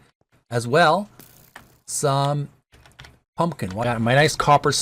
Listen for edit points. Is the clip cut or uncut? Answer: cut